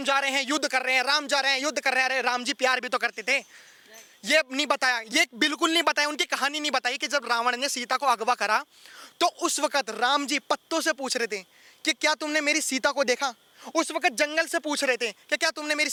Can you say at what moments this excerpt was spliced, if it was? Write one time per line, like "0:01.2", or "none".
none